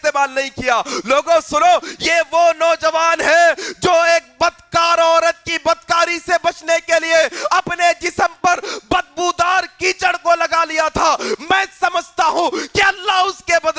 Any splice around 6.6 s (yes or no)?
no